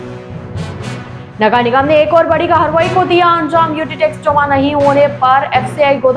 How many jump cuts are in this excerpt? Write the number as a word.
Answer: one